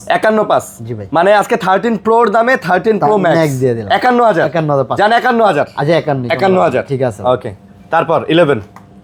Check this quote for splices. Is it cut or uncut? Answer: uncut